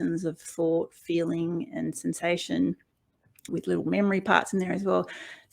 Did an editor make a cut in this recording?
yes; 1 cut; at 3.5 s

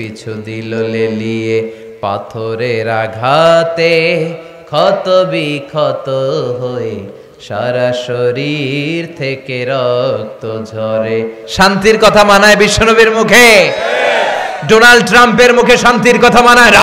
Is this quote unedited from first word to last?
no; 1 cut; at 11.4 s

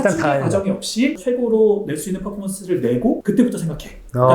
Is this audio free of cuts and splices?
no; 1 cut; at 1.2 s

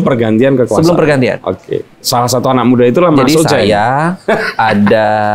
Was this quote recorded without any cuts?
yes; 0 cuts

